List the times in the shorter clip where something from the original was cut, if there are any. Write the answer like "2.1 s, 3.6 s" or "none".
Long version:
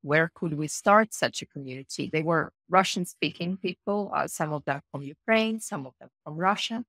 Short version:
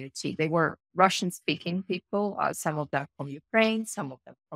none